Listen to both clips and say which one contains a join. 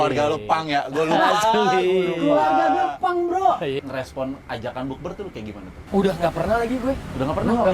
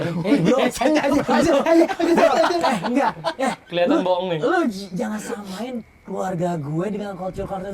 first; 2 cuts; at 3.8 s, 5.8 s

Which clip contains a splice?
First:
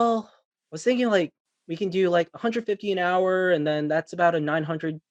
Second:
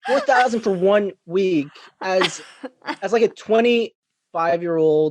second; 1 cut; at 4.0 s

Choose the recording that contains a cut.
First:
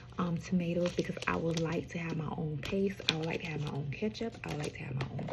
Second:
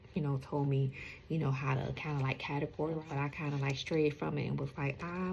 second; 1 cut; at 3.1 s

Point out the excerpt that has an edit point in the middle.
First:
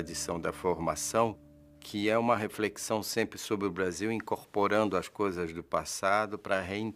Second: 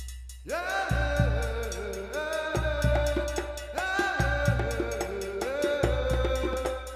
first; 1 cut; at 3.9 s

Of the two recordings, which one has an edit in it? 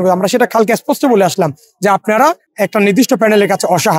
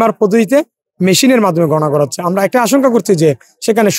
first; 1 cut; at 2.5 s

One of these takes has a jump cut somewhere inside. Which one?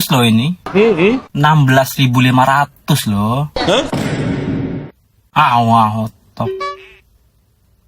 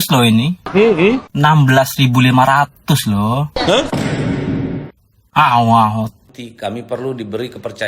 second; 1 cut; at 6.2 s

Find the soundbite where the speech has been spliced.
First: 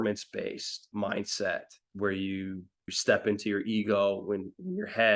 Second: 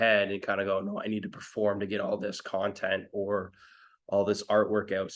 first; 3 cuts; at 0.9 s, 1.8 s, 3.0 s

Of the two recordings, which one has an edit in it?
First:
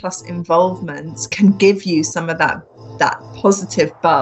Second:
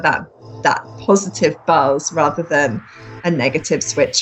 first; 1 cut; at 1.2 s

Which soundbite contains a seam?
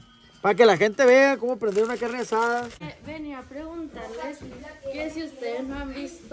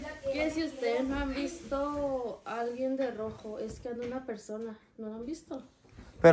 first; 1 cut; at 2.8 s

